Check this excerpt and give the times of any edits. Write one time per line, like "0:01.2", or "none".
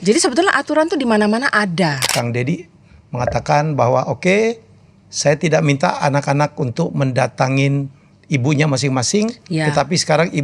0:02.1